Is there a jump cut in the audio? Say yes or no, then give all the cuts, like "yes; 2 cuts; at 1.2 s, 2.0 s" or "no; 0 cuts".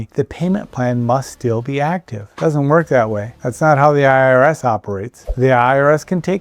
no; 0 cuts